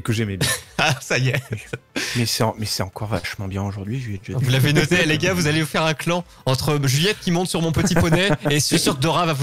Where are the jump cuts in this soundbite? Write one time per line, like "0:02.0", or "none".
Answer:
none